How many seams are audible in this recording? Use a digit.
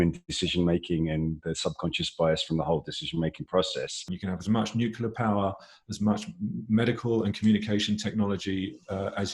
1